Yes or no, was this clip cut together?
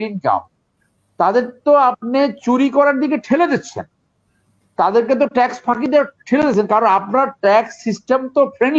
no